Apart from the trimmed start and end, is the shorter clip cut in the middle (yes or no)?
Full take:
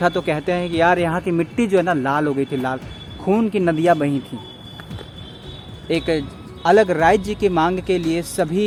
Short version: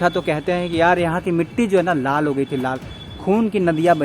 no